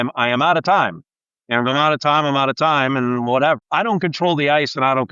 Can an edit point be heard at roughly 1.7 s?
no; 1 cut; at 3.6 s

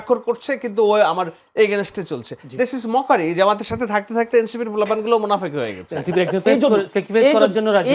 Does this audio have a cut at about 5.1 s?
no; 1 cut; at 6.4 s

